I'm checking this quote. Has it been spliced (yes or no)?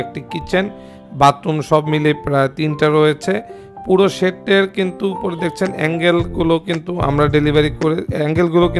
no